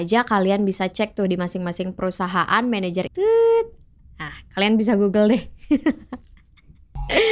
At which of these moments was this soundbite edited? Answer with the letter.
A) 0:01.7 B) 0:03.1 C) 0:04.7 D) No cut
B